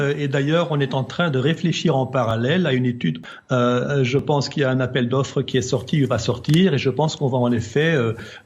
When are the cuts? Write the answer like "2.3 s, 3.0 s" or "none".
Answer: 3.3 s